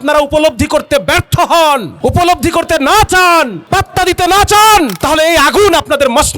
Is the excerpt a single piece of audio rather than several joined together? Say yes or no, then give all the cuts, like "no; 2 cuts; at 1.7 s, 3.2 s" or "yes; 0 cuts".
no; 3 cuts; at 1.9 s, 3.6 s, 5.0 s